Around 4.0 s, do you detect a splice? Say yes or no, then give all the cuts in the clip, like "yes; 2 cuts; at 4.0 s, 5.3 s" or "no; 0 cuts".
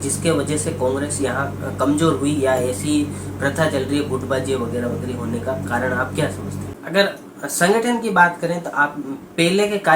no; 1 cut; at 6.7 s